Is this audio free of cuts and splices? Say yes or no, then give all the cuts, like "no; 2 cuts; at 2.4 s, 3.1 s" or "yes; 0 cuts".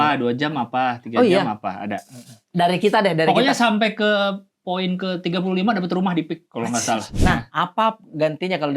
no; 1 cut; at 7.2 s